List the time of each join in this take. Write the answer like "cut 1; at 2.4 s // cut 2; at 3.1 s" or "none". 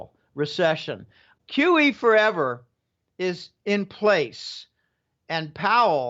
cut 1; at 1.4 s